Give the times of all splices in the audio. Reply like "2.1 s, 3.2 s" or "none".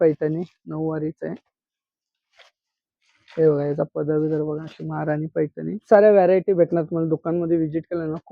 5.8 s